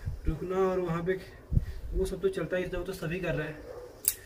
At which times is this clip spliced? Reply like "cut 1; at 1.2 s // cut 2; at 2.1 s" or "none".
none